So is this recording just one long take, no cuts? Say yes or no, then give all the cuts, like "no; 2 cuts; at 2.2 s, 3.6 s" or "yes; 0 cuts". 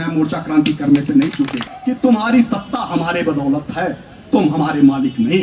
no; 1 cut; at 1.7 s